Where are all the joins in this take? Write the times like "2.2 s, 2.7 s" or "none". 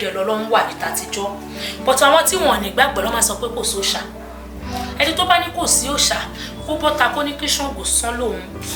none